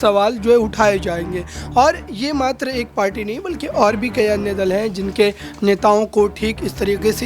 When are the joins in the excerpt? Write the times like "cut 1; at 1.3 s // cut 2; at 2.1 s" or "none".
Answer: none

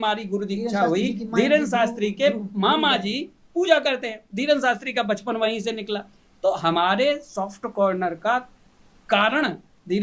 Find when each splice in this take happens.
none

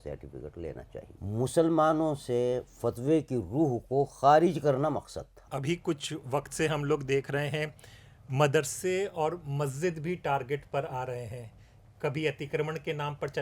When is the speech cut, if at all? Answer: cut 1; at 1.1 s // cut 2; at 5.4 s

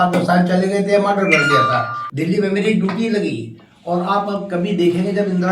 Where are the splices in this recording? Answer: cut 1; at 2.0 s

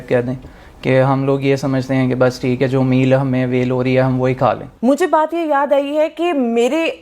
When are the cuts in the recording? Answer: cut 1; at 4.7 s

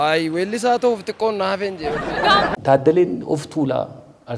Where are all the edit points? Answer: cut 1; at 2.5 s

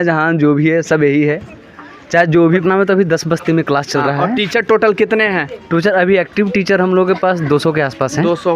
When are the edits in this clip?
cut 1; at 2.6 s

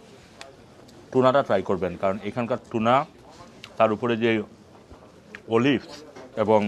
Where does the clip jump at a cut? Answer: none

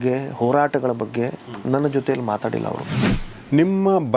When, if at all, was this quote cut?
cut 1; at 3.0 s

